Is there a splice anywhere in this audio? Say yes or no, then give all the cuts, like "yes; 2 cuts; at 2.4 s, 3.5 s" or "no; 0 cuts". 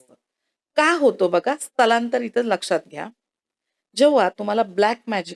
no; 0 cuts